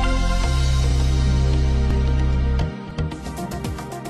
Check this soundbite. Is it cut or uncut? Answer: uncut